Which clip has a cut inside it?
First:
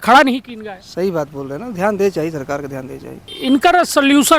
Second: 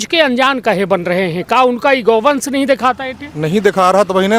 first; 1 cut; at 3.3 s

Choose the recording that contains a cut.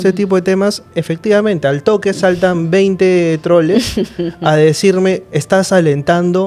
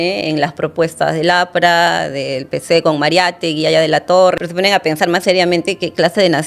second; 1 cut; at 4.4 s

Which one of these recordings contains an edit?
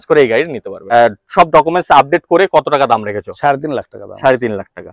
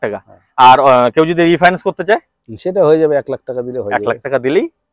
first; 1 cut; at 0.9 s

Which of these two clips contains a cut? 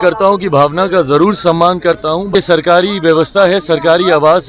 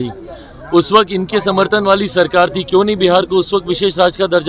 first; 1 cut; at 2.3 s

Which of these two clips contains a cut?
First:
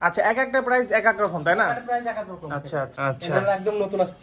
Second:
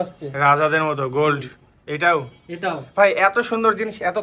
first; 1 cut; at 2.9 s

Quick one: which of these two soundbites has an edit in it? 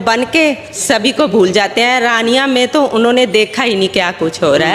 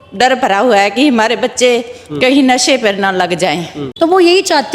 second; 1 cut; at 3.8 s

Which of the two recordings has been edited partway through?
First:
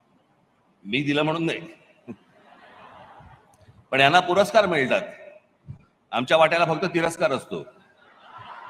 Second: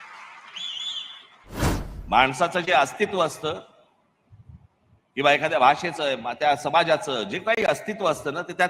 second; 1 cut; at 1.8 s

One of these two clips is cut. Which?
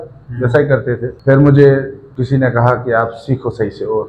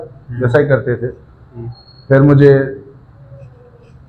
first; 2 cuts; at 1.1 s, 2.0 s

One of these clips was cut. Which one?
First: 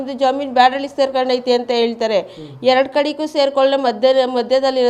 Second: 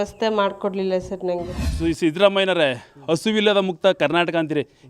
second; 1 cut; at 1.6 s

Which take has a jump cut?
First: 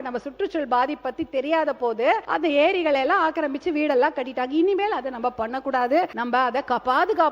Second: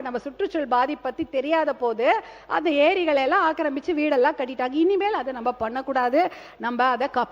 first; 2 cuts; at 2.2 s, 6.2 s

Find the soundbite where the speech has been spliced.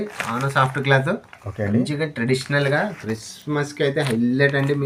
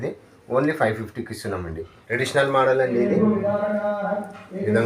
second; 1 cut; at 2.0 s

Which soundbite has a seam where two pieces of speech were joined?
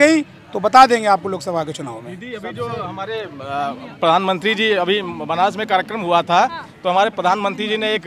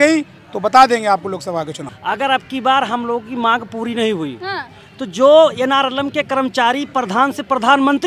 second; 1 cut; at 1.9 s

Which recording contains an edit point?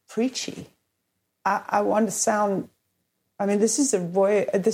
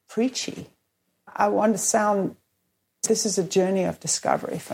second; 2 cuts; at 1.3 s, 3.0 s

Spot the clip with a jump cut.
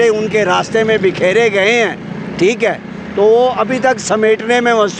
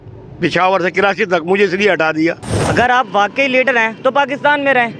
second; 1 cut; at 2.5 s

